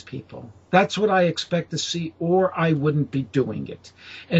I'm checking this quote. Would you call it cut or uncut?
uncut